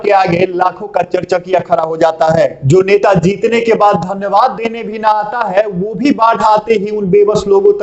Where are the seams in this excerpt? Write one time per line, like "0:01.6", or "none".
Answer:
0:02.6